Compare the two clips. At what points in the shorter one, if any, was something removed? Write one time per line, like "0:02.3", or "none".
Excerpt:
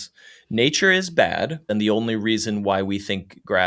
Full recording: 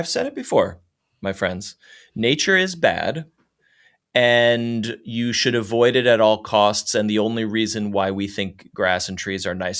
0:01.6

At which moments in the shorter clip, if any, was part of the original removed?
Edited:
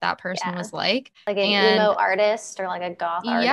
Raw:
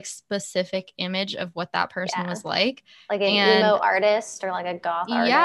0:01.1

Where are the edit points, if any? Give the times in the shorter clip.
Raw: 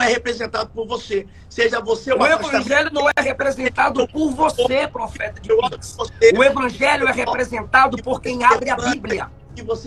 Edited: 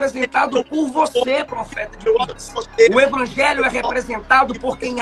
none

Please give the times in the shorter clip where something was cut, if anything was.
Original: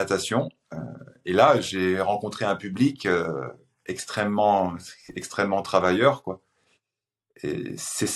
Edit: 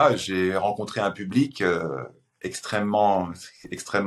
none

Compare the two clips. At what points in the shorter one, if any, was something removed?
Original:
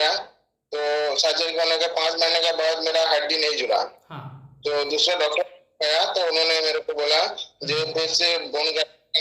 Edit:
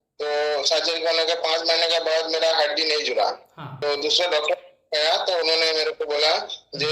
0:03.8

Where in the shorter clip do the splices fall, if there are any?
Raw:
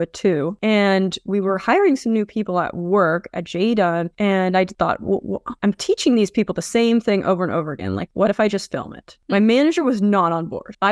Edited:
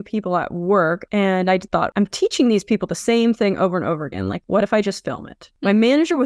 0:01.0
0:01.9

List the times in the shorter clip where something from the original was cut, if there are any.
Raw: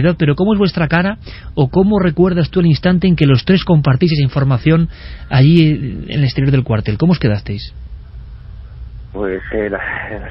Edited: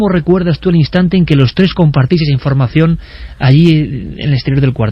none

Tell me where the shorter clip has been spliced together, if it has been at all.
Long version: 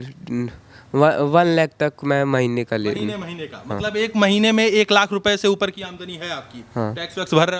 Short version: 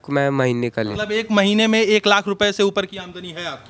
0:00.9

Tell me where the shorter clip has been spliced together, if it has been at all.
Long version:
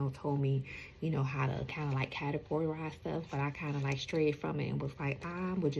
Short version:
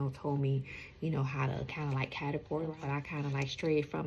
0:02.8

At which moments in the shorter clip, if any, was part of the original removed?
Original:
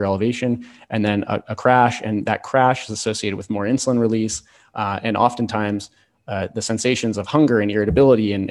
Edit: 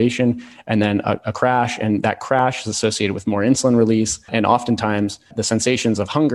0:04.2
0:05.3

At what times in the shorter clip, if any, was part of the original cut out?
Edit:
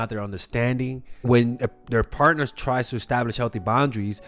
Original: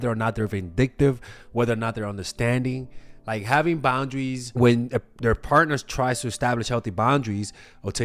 0:01.1

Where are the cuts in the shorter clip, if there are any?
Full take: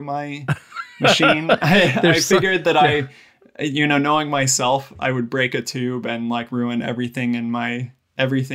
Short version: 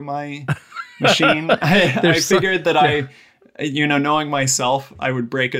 none

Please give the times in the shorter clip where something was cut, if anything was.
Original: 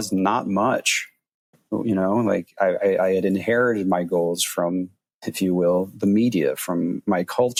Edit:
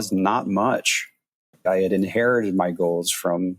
0:01.6

